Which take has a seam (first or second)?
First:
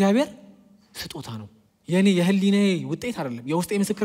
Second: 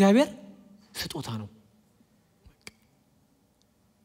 first